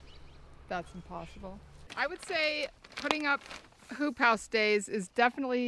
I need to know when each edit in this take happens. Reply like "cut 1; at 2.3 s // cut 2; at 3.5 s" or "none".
cut 1; at 1.8 s

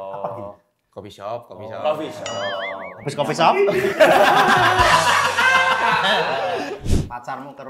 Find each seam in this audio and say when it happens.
cut 1; at 6.8 s

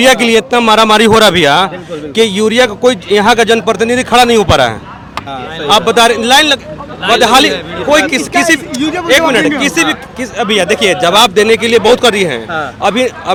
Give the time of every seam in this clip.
none

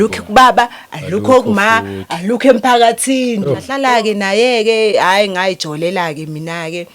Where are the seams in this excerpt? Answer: cut 1; at 3.7 s

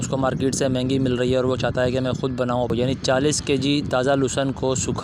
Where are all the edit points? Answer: cut 1; at 2.7 s

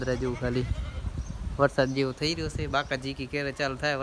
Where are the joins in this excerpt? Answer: none

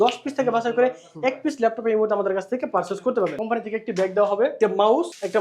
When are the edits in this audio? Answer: cut 1; at 3.4 s

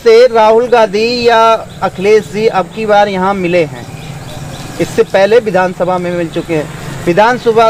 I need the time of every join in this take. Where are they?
none

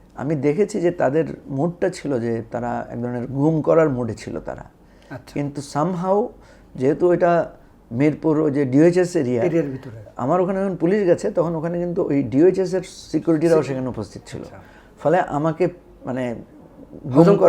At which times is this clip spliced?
none

